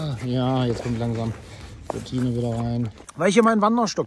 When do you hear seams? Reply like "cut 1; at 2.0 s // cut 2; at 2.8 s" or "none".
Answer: cut 1; at 3.0 s